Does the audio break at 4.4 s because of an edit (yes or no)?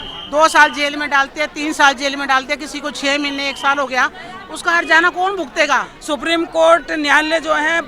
no